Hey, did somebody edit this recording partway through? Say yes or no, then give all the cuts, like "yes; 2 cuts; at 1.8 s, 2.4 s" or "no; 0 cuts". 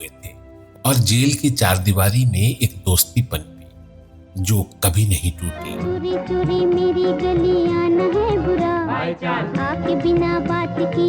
yes; 1 cut; at 5.7 s